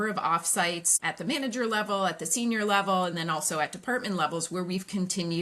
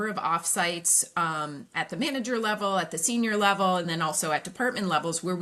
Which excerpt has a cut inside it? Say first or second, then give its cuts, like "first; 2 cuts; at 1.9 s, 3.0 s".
first; 1 cut; at 0.9 s